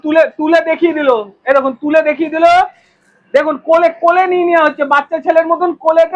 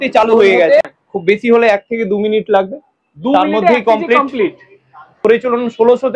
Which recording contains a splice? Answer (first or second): second